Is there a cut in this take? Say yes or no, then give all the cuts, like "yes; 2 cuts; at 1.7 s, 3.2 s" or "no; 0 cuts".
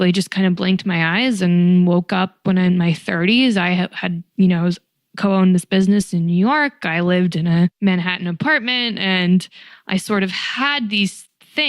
yes; 1 cut; at 7.8 s